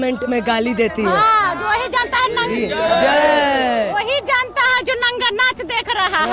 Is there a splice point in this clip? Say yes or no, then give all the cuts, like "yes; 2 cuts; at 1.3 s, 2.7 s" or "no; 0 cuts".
no; 0 cuts